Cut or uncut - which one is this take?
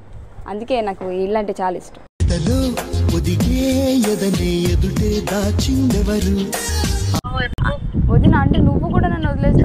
cut